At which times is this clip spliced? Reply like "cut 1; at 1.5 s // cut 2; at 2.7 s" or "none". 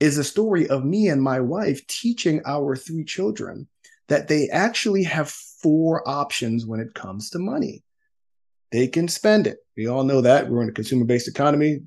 none

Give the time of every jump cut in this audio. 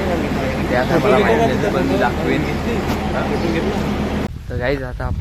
cut 1; at 4.3 s

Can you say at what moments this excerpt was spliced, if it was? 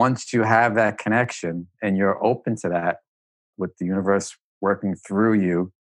cut 1; at 3.4 s

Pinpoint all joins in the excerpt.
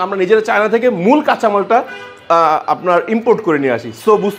none

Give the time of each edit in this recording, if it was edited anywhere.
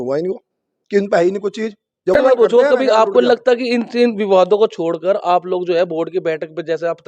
cut 1; at 2.2 s

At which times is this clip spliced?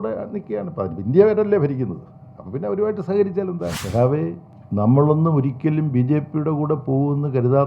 cut 1; at 3.8 s // cut 2; at 4.5 s

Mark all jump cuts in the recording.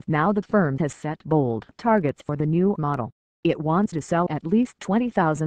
cut 1; at 1.8 s

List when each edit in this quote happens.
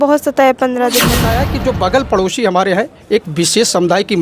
cut 1; at 1.3 s

